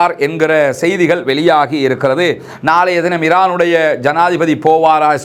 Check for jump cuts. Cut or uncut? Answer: uncut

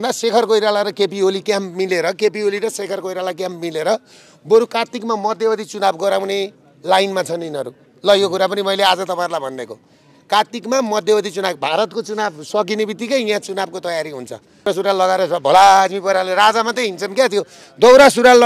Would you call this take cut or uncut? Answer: cut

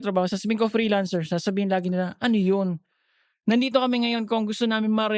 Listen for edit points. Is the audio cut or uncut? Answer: uncut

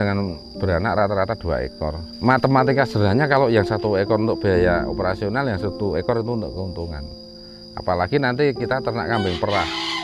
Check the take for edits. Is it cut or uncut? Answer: uncut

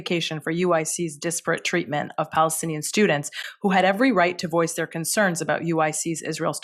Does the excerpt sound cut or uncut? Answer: uncut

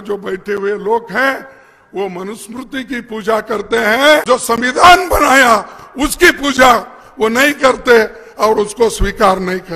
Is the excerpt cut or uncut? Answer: cut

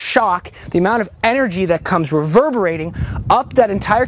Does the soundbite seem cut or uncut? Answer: uncut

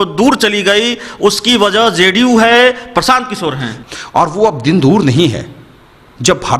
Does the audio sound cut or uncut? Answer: cut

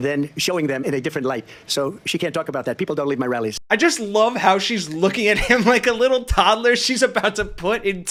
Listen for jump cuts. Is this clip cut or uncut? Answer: uncut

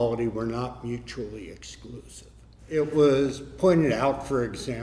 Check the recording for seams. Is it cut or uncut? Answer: cut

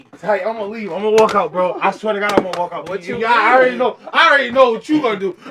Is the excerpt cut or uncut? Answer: uncut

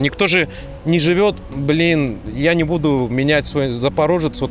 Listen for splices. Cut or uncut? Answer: uncut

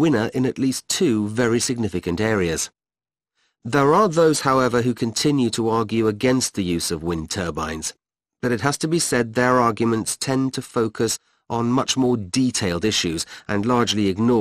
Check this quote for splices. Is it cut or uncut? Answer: cut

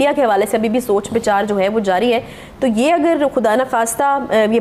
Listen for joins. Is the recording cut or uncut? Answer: uncut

